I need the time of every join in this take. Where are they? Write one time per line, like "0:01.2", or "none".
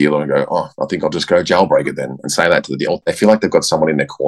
0:02.9